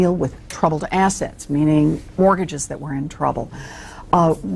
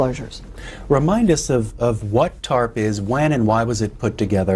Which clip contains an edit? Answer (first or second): second